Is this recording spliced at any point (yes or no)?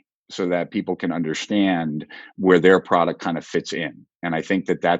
no